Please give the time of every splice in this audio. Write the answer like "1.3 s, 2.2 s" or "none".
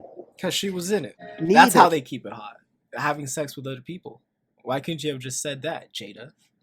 1.1 s